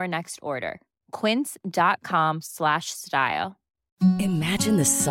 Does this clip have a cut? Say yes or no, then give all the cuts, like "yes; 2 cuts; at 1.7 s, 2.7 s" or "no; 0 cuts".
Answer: no; 0 cuts